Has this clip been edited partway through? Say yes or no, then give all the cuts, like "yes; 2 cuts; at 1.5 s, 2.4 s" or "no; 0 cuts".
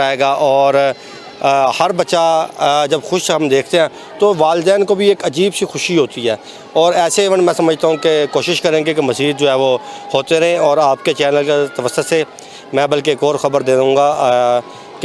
no; 0 cuts